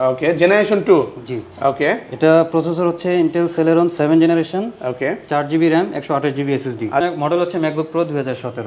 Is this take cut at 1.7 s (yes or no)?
no